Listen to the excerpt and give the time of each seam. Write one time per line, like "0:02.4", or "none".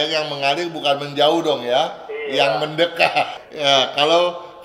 0:03.4